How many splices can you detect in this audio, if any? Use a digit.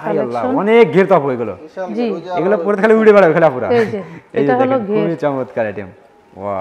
0